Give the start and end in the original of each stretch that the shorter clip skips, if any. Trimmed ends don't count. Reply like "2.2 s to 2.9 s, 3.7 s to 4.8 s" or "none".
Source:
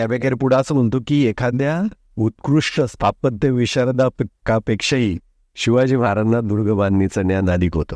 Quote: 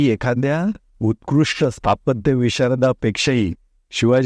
4.1 s to 4.6 s